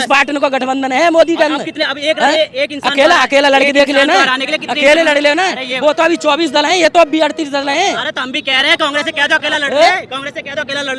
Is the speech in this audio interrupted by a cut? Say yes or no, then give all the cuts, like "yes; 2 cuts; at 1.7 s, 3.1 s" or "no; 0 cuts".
no; 0 cuts